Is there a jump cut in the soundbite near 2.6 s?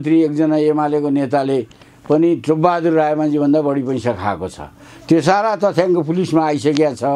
no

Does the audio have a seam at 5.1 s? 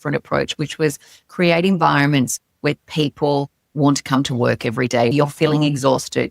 yes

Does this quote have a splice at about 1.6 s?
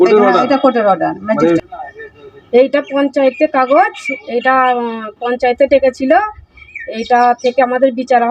yes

